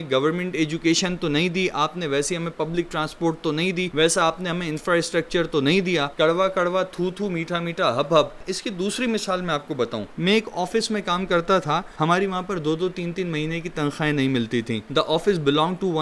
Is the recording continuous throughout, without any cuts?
yes; 0 cuts

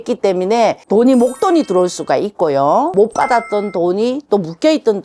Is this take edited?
no; 0 cuts

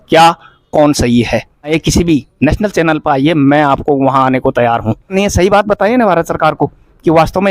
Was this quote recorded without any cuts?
no; 2 cuts; at 1.8 s, 5.1 s

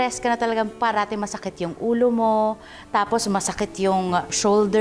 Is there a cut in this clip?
no; 0 cuts

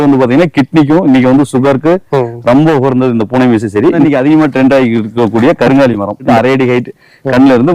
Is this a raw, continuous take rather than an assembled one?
no; 2 cuts; at 4.0 s, 6.3 s

